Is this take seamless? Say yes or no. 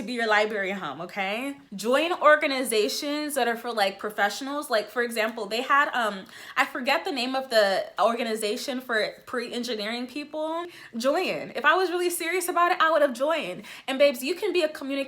no